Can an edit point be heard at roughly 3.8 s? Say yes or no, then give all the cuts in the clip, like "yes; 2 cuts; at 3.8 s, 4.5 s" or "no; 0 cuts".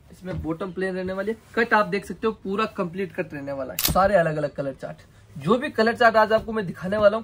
yes; 1 cut; at 3.8 s